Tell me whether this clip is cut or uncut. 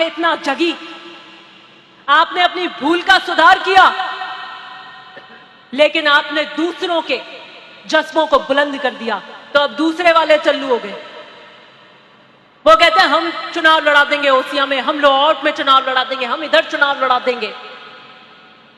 uncut